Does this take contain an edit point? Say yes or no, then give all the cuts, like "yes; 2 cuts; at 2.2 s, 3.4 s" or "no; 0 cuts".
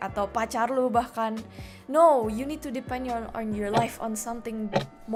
no; 0 cuts